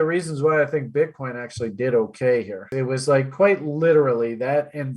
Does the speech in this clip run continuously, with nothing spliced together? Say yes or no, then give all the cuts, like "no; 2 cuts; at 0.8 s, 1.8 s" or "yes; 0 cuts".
no; 1 cut; at 2.7 s